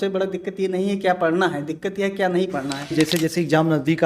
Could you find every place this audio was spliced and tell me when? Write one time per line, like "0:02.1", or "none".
0:02.9